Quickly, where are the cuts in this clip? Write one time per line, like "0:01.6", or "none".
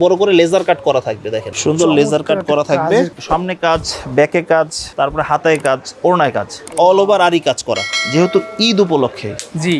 0:01.5
0:03.2
0:04.8
0:07.9